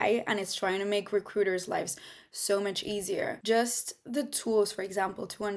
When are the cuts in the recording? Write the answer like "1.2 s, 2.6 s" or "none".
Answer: 3.4 s